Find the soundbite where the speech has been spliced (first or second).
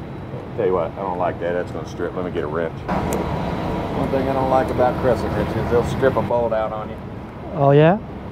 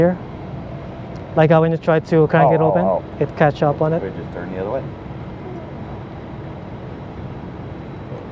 first